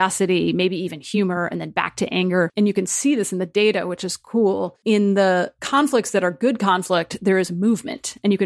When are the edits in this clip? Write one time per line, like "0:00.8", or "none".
0:02.5
0:04.7
0:05.6